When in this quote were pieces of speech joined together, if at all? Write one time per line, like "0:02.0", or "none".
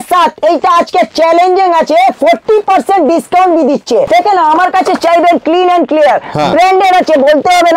0:04.1